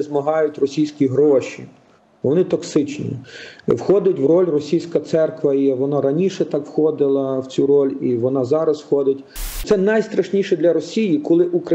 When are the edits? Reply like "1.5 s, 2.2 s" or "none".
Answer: 9.6 s